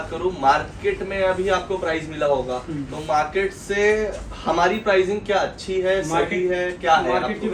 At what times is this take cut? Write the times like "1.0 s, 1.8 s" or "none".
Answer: none